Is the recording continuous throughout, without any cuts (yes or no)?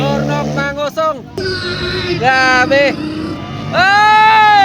no